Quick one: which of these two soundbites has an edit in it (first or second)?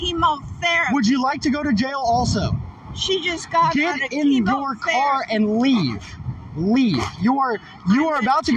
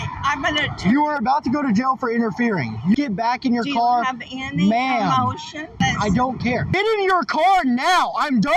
second